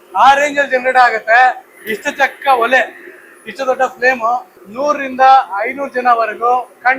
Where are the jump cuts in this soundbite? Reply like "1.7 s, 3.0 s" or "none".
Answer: 4.6 s